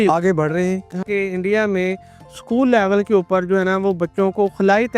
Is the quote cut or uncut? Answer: cut